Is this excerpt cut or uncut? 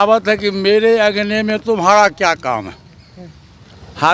uncut